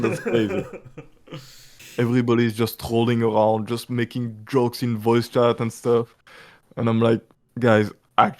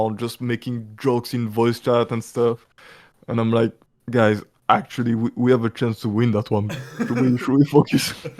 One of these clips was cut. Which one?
first; 1 cut; at 1.7 s

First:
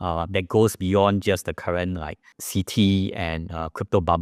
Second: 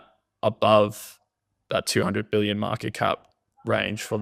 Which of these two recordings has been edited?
first; 1 cut; at 2.3 s

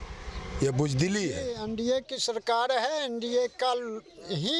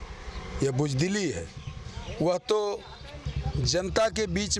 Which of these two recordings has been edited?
first; 1 cut; at 1.6 s

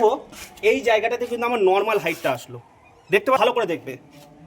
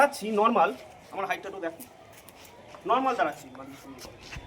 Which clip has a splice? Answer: first; 1 cut; at 3.4 s

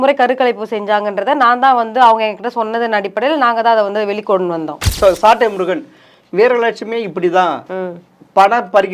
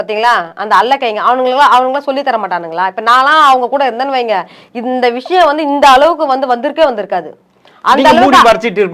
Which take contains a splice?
first; 1 cut; at 4.9 s

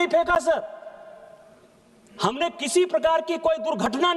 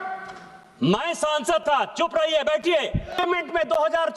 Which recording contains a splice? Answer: second; 1 cut; at 3.2 s

